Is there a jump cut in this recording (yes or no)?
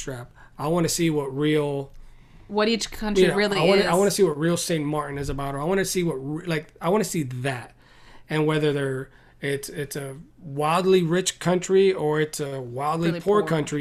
no